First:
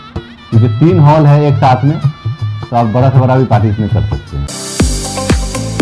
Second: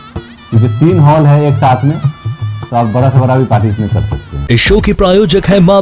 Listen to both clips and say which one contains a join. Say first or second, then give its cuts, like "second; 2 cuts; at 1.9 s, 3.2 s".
first; 1 cut; at 4.4 s